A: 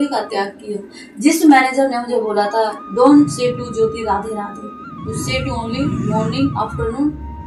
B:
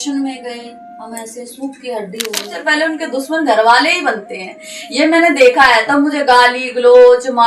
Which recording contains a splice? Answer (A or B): B